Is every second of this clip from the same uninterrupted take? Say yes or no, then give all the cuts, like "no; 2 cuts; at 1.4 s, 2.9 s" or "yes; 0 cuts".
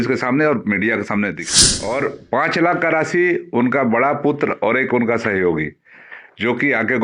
no; 1 cut; at 1.4 s